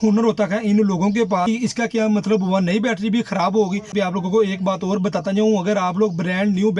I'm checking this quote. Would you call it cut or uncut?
cut